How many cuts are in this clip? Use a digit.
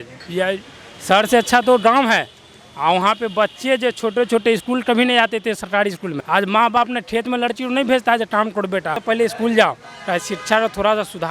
2